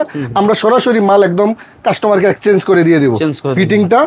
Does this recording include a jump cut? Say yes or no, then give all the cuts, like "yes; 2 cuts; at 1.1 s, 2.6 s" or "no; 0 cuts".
no; 0 cuts